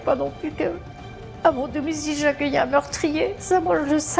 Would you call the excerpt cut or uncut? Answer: uncut